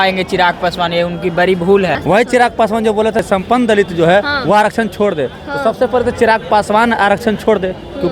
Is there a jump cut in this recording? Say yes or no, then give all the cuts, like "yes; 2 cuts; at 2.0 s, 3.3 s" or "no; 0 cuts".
yes; 2 cuts; at 2.0 s, 3.2 s